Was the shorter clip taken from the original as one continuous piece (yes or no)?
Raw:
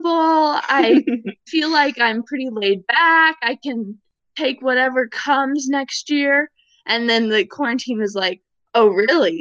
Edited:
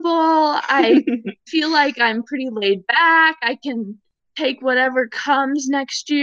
yes